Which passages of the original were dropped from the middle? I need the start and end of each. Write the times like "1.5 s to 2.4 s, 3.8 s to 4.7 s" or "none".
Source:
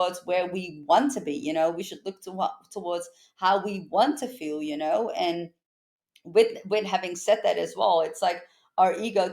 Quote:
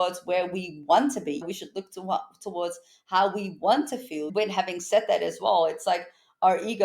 1.4 s to 1.7 s, 4.6 s to 6.6 s

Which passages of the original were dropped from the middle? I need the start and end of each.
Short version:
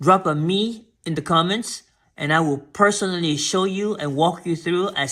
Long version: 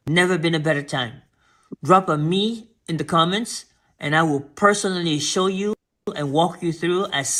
5.8 s to 6.1 s

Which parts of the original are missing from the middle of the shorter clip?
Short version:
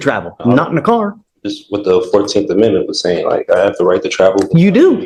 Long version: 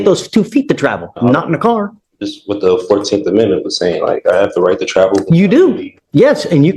none

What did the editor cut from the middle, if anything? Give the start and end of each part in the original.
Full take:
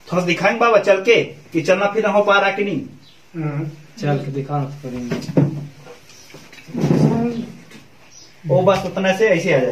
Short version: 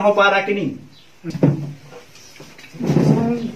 3.4 s to 5.2 s

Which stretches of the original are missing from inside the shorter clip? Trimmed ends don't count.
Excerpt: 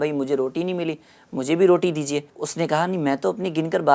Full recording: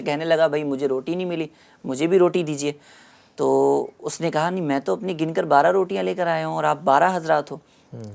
2.9 s to 4.0 s

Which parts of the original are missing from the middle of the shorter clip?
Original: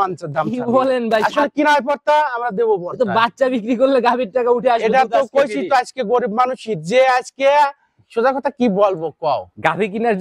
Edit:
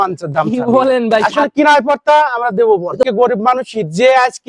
3.1 s to 6.0 s

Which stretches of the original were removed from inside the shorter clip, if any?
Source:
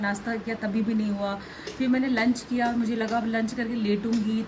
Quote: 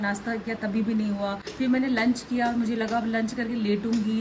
1.4 s to 1.6 s

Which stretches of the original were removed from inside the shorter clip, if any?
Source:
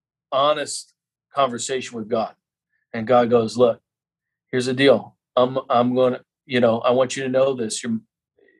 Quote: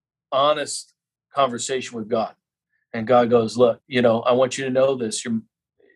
3.8 s to 6.4 s

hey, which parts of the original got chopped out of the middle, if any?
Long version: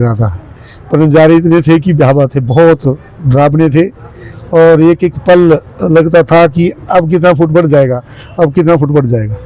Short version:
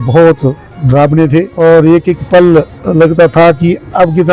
3.9 s to 4.5 s

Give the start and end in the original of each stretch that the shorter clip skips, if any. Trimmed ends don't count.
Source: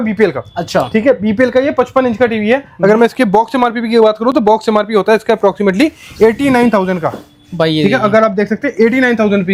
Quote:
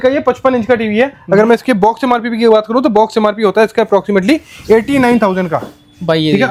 none

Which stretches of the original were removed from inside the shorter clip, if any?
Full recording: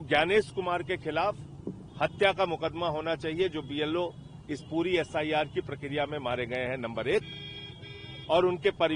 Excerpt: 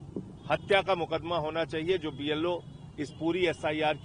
none

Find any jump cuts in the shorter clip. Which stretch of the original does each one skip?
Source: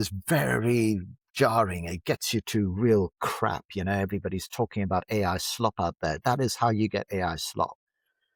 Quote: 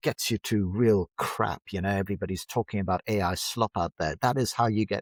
none

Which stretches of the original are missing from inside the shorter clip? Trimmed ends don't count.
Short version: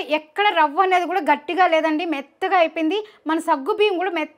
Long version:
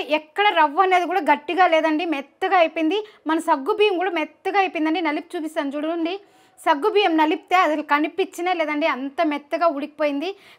none

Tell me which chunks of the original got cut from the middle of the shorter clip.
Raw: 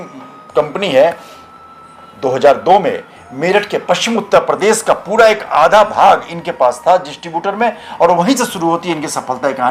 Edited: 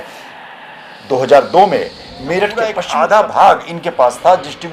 3.9 s to 5.4 s

